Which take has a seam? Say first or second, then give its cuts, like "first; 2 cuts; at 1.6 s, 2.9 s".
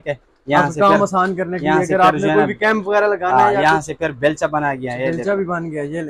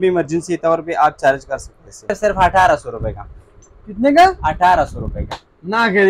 second; 1 cut; at 2.1 s